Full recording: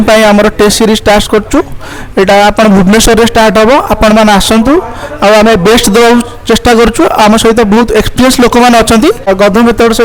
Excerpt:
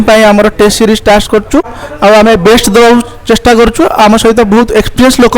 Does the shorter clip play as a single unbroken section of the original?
no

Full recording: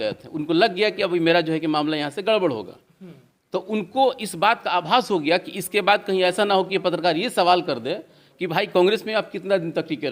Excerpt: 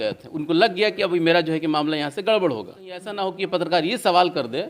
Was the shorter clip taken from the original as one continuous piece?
no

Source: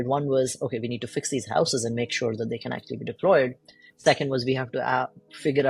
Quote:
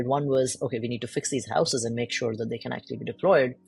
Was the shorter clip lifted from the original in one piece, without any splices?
yes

